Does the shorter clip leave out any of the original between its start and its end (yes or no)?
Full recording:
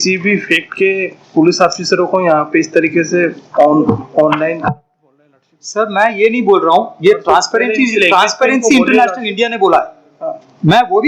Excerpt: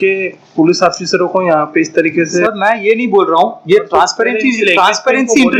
yes